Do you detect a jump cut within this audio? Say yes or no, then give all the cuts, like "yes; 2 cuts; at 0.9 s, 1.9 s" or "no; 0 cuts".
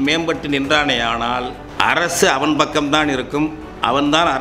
yes; 1 cut; at 1.6 s